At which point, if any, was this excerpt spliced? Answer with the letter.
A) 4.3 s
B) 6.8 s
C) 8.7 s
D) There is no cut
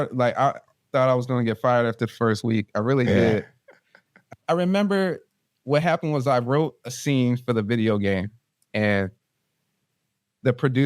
A